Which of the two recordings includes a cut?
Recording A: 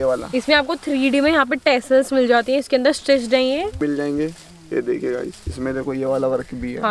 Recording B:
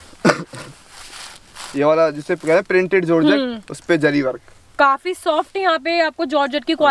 A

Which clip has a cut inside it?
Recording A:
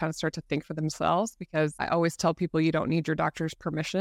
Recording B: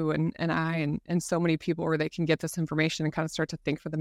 A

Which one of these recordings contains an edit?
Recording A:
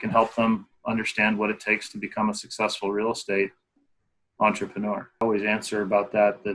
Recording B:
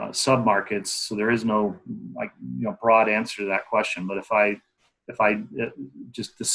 A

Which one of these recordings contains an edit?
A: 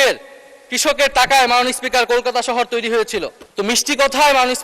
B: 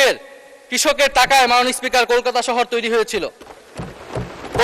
A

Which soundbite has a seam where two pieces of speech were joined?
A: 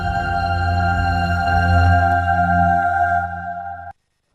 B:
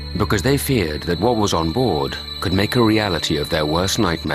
A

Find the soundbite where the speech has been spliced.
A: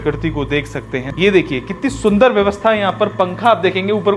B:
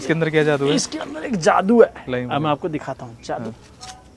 A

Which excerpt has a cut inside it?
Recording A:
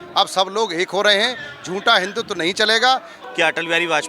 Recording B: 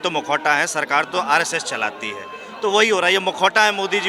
A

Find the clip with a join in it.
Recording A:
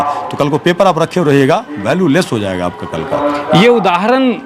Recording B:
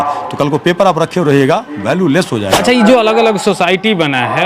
B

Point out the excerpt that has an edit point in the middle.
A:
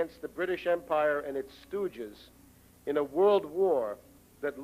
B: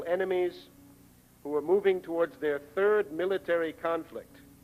A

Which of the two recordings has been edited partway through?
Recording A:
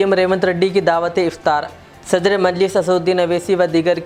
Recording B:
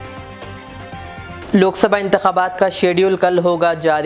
B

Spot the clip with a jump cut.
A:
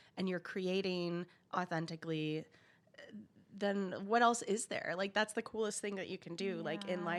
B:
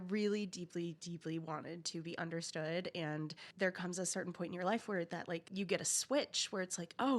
B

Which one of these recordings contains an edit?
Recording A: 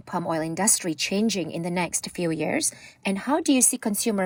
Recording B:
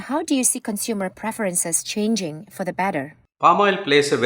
B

